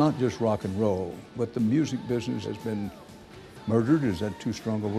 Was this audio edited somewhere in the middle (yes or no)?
yes